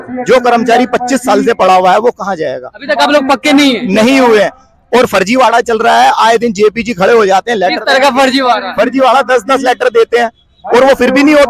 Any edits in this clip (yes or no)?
no